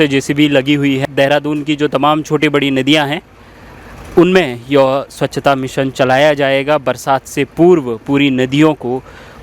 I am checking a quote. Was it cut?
yes; 1 cut; at 1.0 s

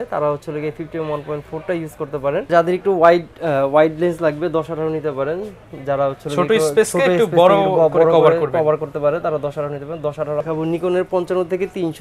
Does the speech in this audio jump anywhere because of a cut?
yes; 2 cuts; at 2.5 s, 10.4 s

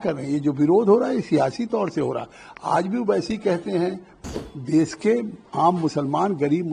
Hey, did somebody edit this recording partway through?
yes; 1 cut; at 4.3 s

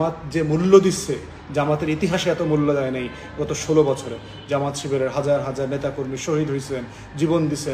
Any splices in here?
no; 0 cuts

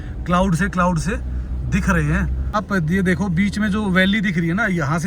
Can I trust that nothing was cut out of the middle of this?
no; 1 cut; at 2.4 s

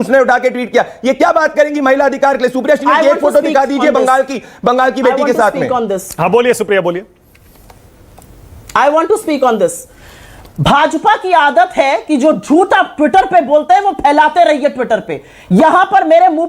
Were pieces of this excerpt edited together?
no; 0 cuts

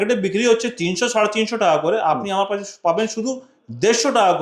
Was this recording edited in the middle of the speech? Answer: no; 0 cuts

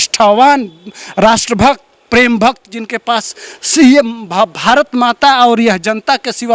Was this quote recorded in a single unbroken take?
yes; 0 cuts

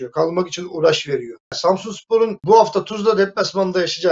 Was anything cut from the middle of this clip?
yes; 2 cuts; at 1.6 s, 2.4 s

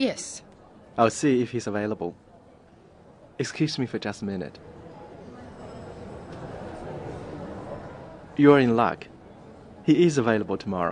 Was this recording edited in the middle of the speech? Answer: yes; 1 cut; at 6.3 s

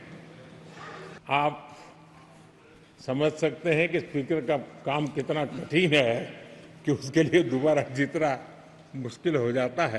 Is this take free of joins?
no; 1 cut; at 1.2 s

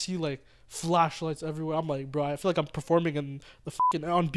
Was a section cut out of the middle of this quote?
no; 0 cuts

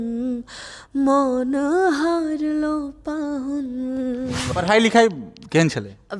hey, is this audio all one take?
no; 1 cut; at 4.4 s

